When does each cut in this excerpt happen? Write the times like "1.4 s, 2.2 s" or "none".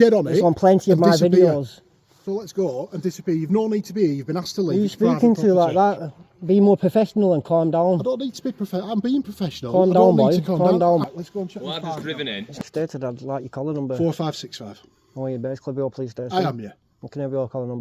11.0 s, 12.6 s